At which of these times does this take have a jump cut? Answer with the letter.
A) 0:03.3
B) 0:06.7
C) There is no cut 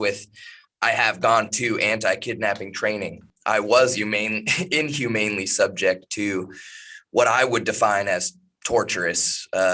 A